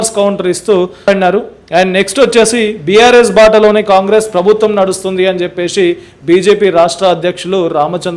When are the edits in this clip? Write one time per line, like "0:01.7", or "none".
0:01.1